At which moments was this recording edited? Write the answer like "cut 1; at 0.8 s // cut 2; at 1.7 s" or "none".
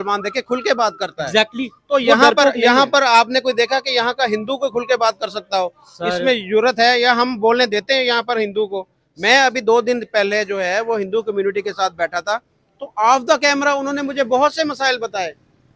none